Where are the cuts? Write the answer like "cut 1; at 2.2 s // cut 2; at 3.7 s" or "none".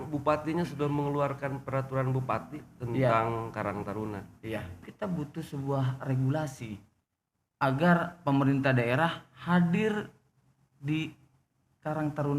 cut 1; at 4.8 s